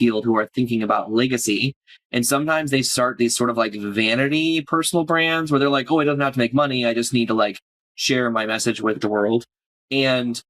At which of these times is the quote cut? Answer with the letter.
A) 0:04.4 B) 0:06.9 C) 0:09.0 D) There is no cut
C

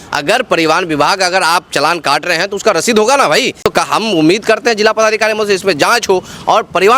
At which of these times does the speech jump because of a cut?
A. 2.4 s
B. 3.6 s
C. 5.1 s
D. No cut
B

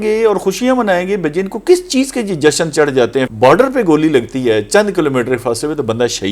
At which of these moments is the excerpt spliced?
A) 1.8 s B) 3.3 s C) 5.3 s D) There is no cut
B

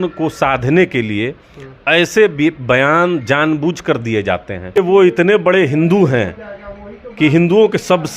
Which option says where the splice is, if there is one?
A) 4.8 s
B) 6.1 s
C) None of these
A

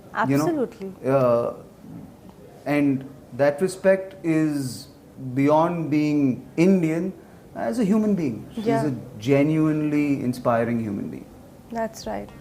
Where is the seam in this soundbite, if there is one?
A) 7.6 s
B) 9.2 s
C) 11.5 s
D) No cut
D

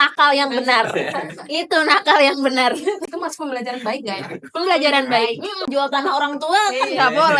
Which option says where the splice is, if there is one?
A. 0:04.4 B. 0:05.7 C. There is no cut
B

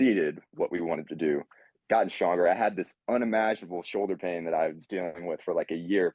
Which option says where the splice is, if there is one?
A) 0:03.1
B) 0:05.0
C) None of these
C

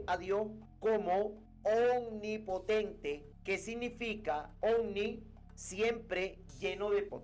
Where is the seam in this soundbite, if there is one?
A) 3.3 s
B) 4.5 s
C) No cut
B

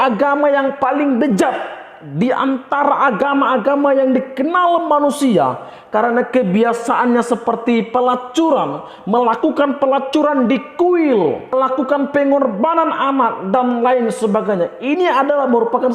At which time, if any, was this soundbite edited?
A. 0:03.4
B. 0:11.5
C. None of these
B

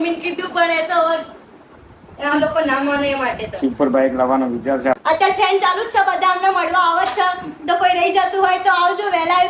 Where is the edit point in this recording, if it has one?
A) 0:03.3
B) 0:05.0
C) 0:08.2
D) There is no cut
B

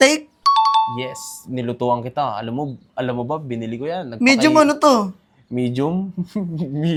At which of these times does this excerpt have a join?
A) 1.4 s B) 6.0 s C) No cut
C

